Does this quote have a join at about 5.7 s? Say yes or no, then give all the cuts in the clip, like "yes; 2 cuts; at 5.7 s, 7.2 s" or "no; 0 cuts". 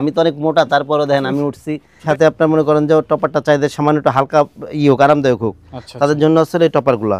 no; 1 cut; at 1.9 s